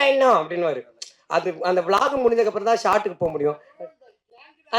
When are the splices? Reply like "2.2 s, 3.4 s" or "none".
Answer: none